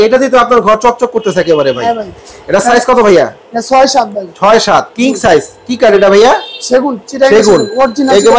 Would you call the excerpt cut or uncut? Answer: uncut